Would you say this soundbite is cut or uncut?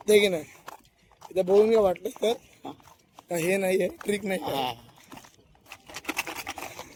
uncut